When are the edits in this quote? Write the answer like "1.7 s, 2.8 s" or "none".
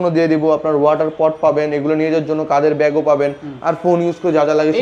none